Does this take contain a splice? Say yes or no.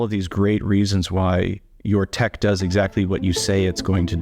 no